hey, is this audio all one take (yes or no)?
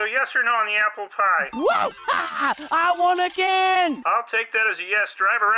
yes